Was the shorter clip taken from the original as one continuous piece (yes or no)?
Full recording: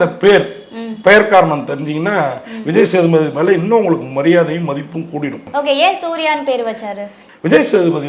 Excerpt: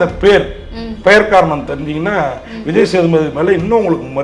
yes